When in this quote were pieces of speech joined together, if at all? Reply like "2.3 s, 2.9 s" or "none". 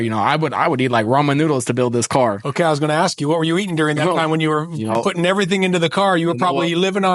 none